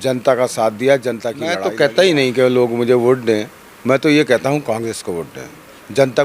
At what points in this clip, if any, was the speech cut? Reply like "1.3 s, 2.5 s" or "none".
1.6 s